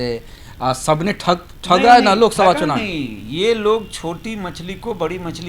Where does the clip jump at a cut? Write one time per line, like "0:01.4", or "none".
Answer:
none